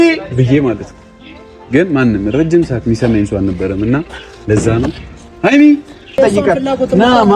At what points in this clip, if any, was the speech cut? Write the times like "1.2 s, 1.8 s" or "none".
6.2 s